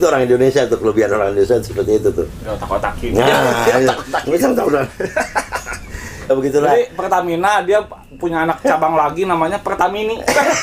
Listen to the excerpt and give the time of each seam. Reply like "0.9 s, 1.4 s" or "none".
6.3 s